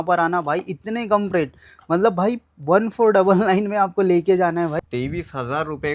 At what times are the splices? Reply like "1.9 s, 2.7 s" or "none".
4.8 s